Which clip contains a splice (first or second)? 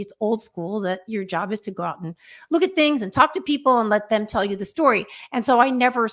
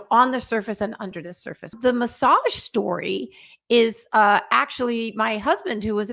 second